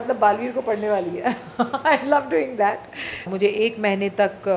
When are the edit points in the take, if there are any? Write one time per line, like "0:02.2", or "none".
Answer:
0:03.3